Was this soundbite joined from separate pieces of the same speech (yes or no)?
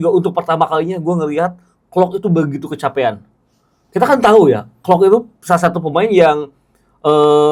no